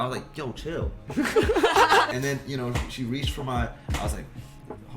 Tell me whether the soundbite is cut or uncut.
cut